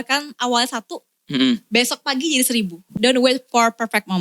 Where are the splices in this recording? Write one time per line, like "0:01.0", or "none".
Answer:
0:02.9